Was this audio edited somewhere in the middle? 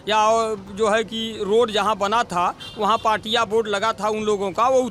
no; 0 cuts

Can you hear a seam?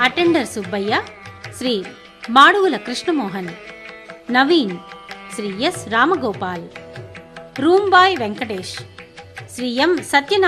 no; 0 cuts

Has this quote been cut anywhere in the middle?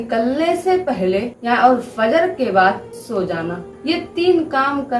no; 0 cuts

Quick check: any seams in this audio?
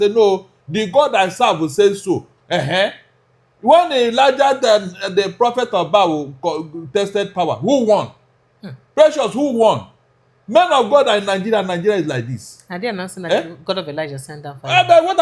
no; 0 cuts

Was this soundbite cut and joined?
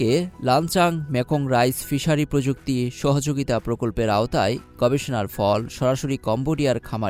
no; 0 cuts

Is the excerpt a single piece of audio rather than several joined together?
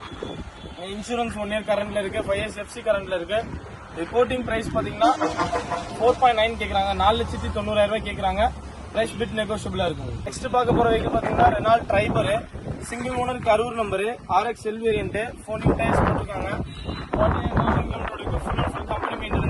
yes; 0 cuts

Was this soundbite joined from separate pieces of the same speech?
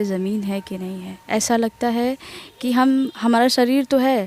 yes; 1 cut; at 1.1 s

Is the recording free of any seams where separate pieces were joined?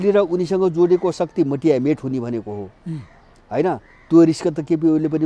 yes; 0 cuts

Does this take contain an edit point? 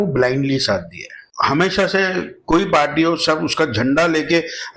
yes; 1 cut; at 1.2 s

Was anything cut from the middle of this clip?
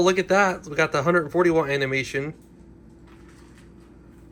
no; 0 cuts

